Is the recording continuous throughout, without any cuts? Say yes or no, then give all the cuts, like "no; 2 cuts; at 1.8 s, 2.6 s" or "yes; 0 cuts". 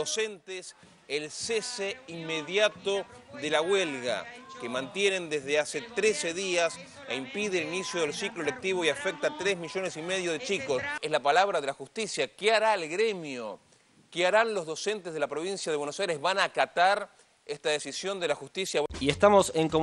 yes; 0 cuts